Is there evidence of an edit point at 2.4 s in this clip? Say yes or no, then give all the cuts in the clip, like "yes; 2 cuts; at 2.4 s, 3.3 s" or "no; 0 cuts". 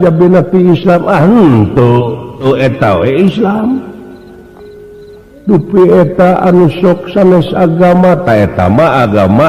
yes; 1 cut; at 2.4 s